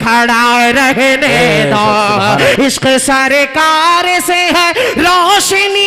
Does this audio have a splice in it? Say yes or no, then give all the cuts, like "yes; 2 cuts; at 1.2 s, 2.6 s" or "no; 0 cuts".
yes; 1 cut; at 2.6 s